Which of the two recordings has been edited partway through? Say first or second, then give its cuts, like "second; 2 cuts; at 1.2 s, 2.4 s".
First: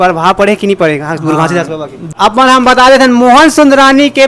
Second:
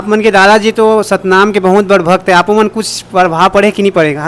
first; 1 cut; at 2.1 s